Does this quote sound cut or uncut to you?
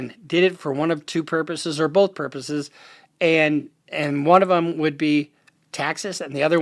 uncut